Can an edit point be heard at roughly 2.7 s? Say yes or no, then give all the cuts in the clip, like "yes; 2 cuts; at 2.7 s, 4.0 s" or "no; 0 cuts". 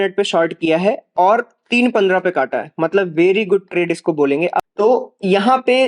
no; 1 cut; at 4.7 s